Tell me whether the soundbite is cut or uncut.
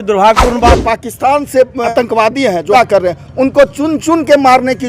cut